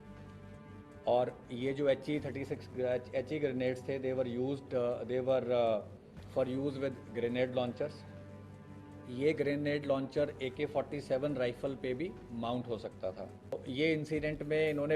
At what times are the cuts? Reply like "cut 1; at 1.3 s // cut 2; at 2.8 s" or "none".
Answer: cut 1; at 13.5 s